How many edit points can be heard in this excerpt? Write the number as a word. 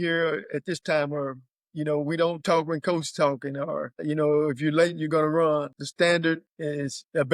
two